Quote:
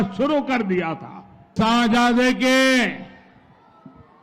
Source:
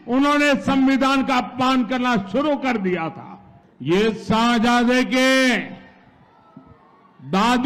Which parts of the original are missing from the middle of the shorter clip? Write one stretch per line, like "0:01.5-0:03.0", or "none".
0:03.6-0:04.2